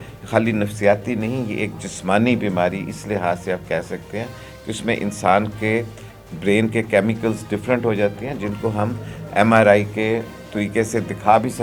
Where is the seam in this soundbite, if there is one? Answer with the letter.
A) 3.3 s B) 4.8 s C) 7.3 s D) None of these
D